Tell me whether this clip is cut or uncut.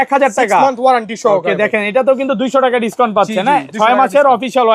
uncut